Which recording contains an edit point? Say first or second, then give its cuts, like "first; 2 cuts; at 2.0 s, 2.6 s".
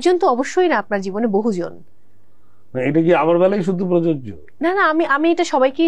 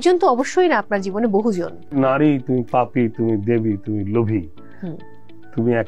second; 1 cut; at 1.9 s